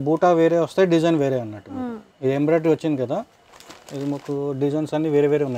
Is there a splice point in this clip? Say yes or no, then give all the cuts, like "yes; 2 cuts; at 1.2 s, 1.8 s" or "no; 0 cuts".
no; 0 cuts